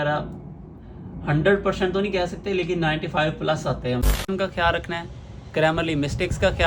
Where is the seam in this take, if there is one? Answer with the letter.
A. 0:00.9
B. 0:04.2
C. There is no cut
B